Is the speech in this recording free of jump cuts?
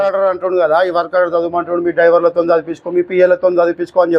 yes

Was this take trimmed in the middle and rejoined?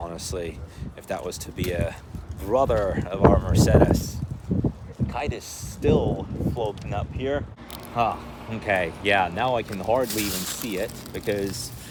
no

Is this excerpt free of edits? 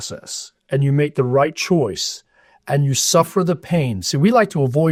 yes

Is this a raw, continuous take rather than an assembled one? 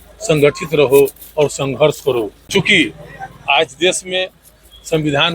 no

